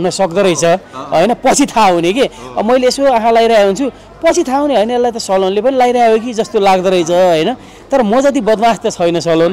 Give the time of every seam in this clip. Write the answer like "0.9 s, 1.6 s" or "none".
none